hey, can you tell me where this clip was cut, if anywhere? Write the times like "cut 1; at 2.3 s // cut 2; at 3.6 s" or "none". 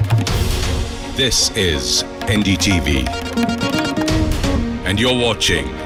none